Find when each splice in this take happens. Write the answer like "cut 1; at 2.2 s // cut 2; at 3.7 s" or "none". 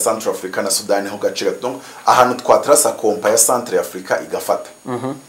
none